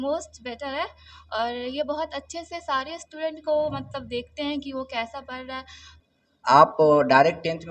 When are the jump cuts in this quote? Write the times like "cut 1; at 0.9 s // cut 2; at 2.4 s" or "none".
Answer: cut 1; at 5.8 s